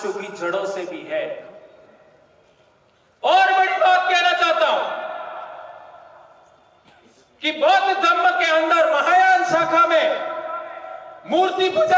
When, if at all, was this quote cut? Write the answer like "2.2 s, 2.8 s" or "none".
none